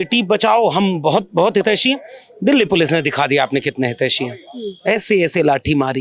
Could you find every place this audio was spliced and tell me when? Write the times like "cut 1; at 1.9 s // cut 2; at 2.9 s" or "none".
none